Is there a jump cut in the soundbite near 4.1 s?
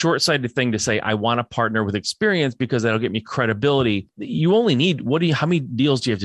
yes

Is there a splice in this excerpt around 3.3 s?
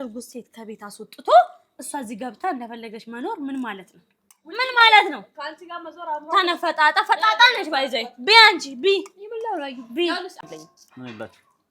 no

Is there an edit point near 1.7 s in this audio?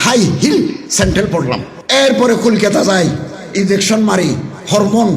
yes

